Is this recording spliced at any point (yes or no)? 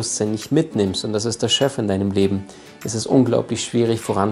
no